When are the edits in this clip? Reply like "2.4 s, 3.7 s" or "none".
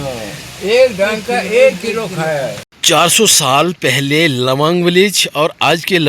2.7 s